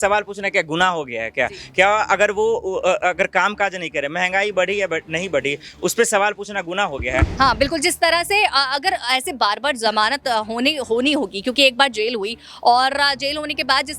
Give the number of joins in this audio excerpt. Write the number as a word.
one